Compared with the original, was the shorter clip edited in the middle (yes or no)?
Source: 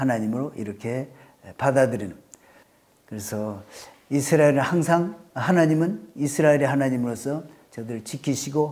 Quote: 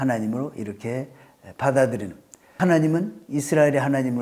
yes